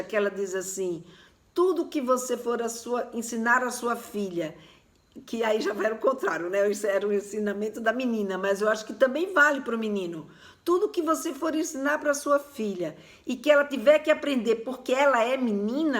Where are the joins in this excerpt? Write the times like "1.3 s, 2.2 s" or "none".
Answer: none